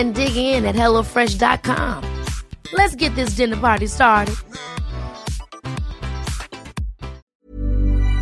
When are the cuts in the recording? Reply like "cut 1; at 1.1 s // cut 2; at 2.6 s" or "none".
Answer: cut 1; at 7.3 s